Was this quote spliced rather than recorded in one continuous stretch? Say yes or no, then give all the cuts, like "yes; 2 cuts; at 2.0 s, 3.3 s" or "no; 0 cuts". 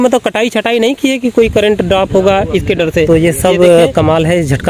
yes; 1 cut; at 3.1 s